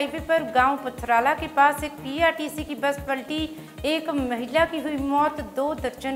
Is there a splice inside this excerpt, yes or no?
no